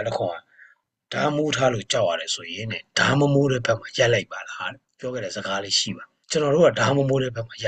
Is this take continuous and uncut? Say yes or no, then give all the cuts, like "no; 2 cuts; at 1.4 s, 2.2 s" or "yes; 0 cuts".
yes; 0 cuts